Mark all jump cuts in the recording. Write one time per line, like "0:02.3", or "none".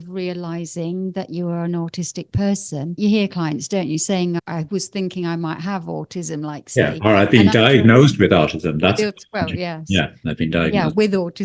0:03.0
0:04.4